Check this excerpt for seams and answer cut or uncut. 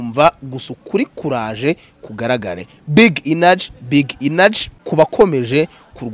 cut